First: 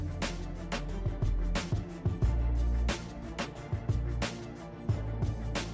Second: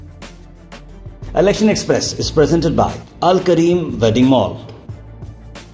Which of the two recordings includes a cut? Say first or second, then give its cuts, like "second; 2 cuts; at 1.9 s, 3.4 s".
second; 2 cuts; at 1.3 s, 4.8 s